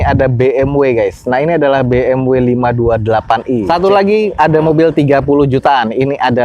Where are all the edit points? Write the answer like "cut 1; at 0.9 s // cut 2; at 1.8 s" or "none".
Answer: cut 1; at 3.7 s